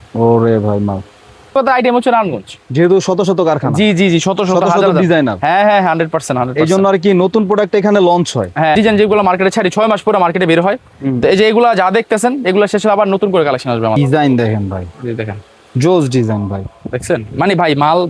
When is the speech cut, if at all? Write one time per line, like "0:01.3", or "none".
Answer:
0:01.6
0:08.7
0:14.0